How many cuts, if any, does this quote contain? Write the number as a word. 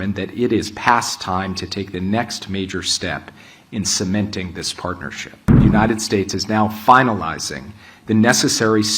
one